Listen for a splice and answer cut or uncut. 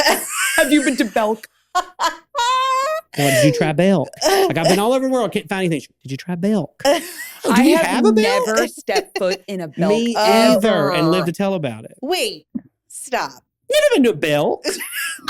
uncut